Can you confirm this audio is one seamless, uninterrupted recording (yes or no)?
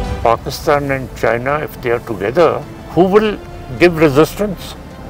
no